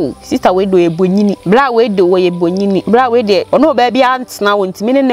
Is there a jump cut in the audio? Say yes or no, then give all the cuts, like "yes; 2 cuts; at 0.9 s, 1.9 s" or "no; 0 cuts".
yes; 3 cuts; at 1.4 s, 2.8 s, 3.5 s